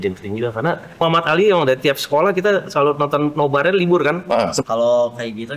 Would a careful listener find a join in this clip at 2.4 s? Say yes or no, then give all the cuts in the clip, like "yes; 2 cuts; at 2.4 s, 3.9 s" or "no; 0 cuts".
no; 2 cuts; at 1.0 s, 4.6 s